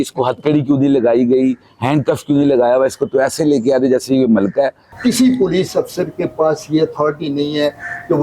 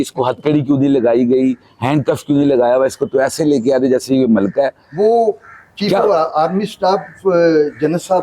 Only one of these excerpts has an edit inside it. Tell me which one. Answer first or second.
first